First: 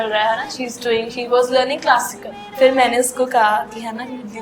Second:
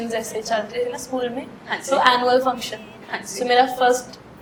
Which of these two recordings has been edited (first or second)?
first